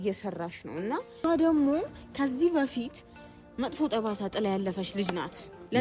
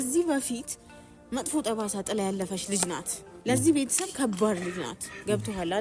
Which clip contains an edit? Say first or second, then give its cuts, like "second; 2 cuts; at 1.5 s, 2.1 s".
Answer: first; 1 cut; at 1.2 s